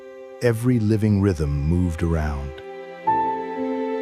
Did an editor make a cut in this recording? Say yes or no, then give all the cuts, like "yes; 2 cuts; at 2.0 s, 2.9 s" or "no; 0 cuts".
no; 0 cuts